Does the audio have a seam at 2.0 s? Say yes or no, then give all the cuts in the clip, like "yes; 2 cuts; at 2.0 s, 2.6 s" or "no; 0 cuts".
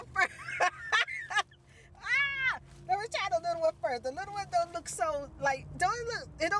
no; 0 cuts